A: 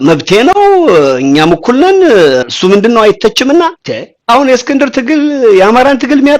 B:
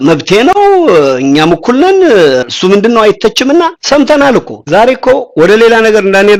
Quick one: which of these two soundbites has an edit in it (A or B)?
A